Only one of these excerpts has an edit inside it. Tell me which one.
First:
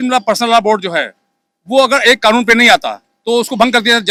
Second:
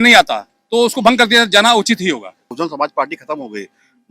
second; 1 cut; at 2.5 s

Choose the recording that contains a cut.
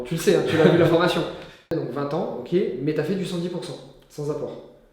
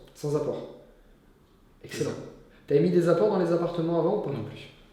first; 1 cut; at 1.7 s

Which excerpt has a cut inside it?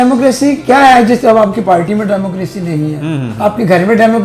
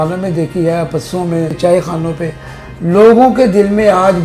second; 1 cut; at 1.6 s

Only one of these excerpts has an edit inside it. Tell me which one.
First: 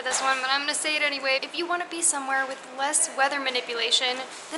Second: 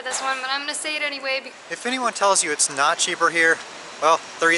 second; 1 cut; at 1.5 s

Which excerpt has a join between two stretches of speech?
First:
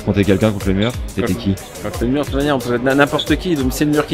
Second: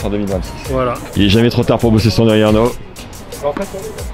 second; 2 cuts; at 1.0 s, 3.0 s

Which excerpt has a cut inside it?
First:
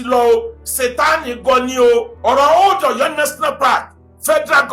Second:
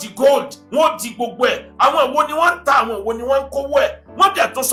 first; 1 cut; at 2.1 s

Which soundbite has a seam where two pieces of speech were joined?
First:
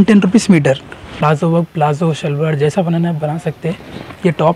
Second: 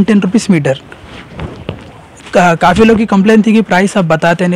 first; 1 cut; at 1.2 s

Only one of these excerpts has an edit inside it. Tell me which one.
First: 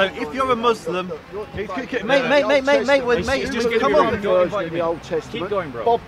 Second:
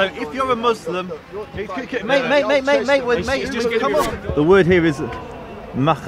second; 1 cut; at 4.2 s

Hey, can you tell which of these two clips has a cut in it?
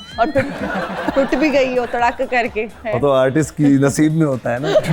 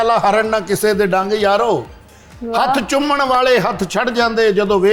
first; 1 cut; at 2.8 s

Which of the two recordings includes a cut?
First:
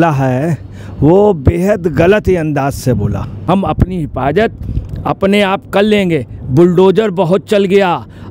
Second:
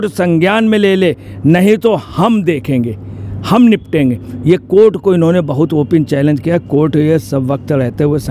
first; 1 cut; at 3.5 s

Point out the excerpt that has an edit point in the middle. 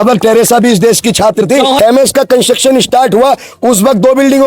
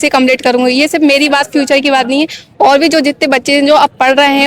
first; 1 cut; at 1.8 s

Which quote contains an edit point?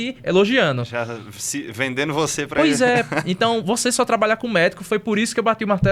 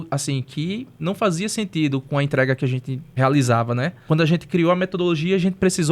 second; 3 cuts; at 0.9 s, 3.0 s, 4.0 s

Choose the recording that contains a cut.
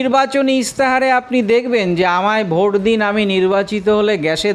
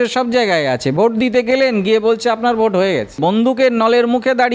second; 1 cut; at 3.2 s

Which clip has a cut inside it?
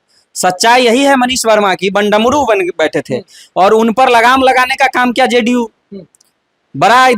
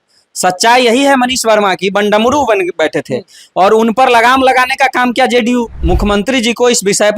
second; 1 cut; at 5.8 s

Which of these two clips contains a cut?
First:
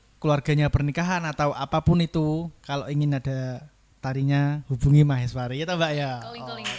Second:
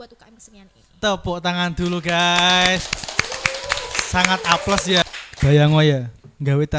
second; 1 cut; at 5.0 s

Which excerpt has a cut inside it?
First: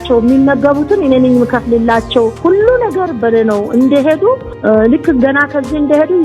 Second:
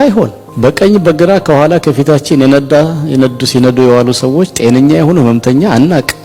first; 2 cuts; at 2.3 s, 4.5 s

